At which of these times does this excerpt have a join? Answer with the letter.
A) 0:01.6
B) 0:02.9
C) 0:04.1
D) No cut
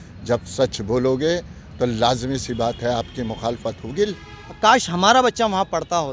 C